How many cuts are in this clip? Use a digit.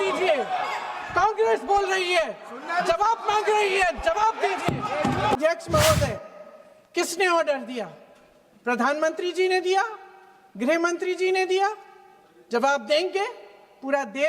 1